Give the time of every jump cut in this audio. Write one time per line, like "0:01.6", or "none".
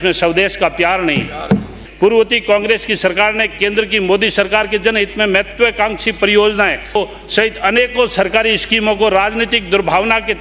0:01.7
0:06.9